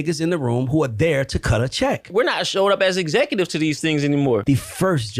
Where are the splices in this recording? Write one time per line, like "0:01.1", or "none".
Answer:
0:02.0
0:04.4